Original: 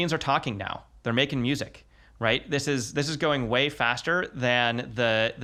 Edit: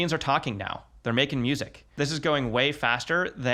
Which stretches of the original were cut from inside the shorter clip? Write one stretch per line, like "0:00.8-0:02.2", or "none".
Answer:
0:01.9-0:02.9